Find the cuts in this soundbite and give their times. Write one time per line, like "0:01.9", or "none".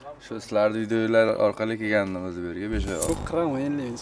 0:03.1